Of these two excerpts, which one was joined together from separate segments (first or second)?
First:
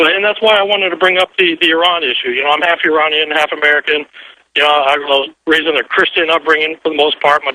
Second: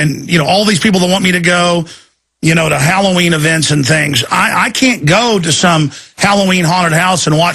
first